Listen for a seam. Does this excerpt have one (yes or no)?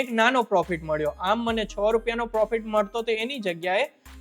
no